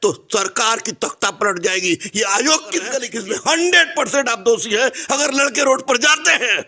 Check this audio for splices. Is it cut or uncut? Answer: cut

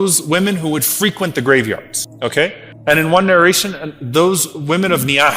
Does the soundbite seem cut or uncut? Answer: cut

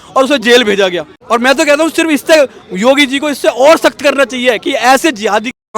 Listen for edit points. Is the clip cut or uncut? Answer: cut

